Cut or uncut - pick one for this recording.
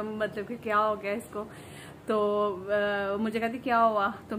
uncut